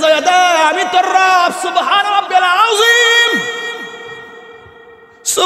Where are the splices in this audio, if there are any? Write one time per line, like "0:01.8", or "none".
none